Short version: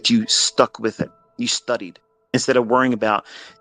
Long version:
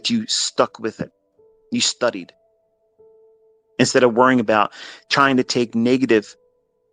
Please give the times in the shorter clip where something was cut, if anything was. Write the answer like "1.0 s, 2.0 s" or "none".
1.2 s, 2.3 s